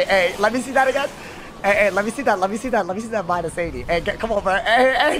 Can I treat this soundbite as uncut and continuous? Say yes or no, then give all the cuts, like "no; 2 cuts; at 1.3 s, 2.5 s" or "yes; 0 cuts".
yes; 0 cuts